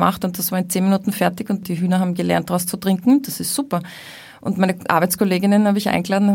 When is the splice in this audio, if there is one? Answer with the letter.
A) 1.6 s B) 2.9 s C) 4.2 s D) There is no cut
A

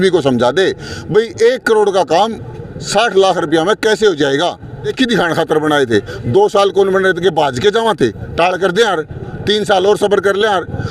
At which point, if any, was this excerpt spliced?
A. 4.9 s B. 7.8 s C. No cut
A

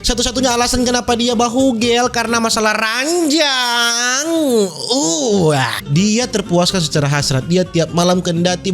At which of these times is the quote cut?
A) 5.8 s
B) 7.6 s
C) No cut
A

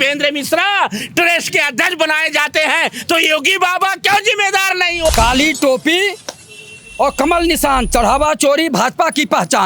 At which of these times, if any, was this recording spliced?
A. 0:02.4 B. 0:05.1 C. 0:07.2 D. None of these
B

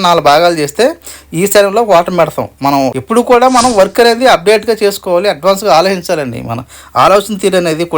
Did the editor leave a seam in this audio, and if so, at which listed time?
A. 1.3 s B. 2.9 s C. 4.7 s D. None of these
B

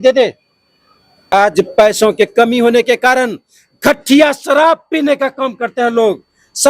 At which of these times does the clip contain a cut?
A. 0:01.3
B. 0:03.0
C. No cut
A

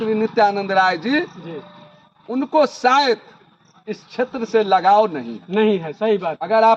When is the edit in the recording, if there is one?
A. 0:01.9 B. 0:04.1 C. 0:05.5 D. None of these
D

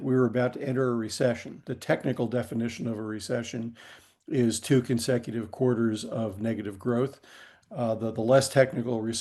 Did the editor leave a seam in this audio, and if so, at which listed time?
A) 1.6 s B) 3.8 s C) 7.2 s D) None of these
A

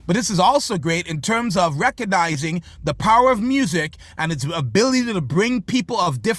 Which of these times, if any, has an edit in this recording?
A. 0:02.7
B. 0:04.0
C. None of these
C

